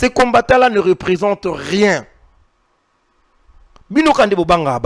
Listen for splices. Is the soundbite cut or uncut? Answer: uncut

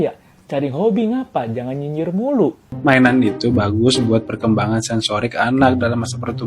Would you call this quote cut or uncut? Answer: cut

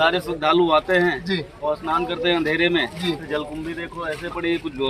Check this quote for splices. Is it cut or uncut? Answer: uncut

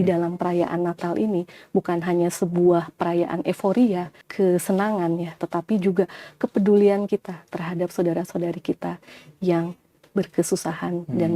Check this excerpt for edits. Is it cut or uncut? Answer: cut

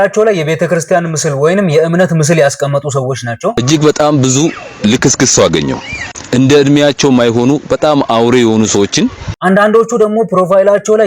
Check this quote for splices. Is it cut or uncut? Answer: cut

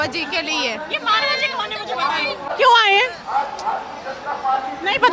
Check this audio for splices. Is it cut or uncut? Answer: cut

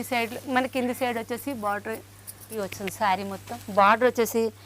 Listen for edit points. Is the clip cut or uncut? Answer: cut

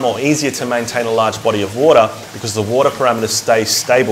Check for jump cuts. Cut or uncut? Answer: uncut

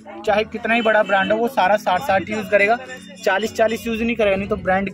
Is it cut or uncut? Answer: uncut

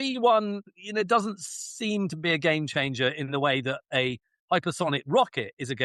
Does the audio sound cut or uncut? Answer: uncut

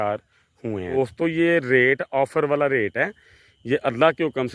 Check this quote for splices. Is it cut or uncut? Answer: cut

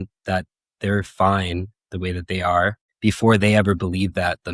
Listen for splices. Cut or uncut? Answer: cut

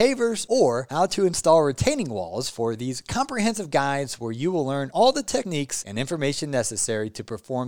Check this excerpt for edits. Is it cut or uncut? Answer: uncut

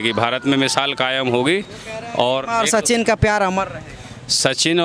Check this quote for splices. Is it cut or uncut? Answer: uncut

